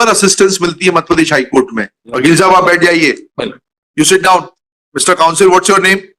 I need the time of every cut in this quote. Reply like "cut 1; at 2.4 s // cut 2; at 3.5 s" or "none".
cut 1; at 2.2 s